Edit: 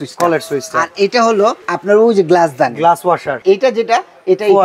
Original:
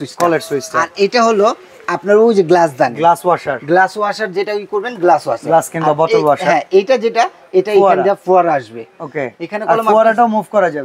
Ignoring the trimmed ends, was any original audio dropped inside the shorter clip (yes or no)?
yes